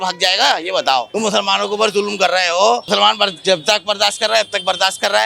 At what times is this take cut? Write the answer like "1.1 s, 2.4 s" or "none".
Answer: 1.1 s, 2.9 s